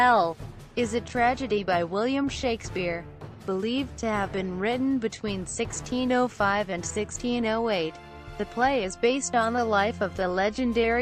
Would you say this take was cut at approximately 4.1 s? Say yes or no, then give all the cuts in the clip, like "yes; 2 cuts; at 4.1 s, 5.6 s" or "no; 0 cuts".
no; 1 cut; at 9.0 s